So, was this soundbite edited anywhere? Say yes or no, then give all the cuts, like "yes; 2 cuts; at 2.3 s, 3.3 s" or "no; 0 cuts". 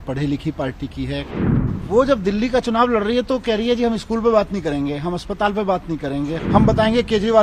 yes; 2 cuts; at 1.3 s, 6.4 s